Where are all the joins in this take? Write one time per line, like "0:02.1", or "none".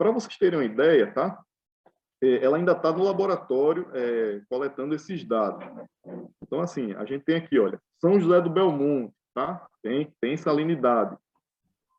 none